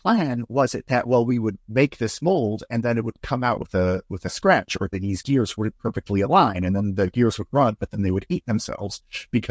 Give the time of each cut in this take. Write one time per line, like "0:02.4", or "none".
none